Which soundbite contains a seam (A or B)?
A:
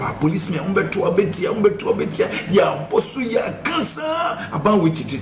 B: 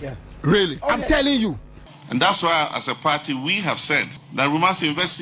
B